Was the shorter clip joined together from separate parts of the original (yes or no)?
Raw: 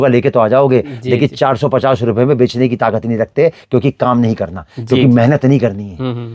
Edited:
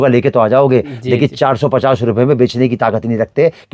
no